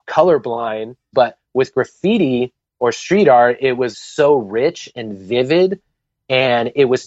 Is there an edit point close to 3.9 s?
yes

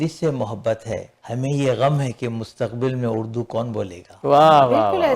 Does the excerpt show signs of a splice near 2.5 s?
no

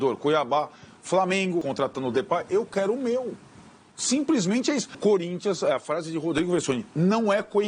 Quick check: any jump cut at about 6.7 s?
no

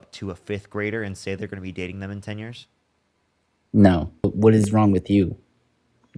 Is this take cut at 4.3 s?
yes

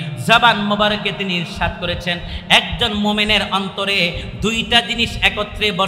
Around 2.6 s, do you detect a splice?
no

